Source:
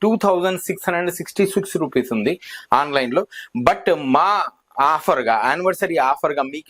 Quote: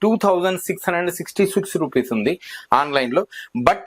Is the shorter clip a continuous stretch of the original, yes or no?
yes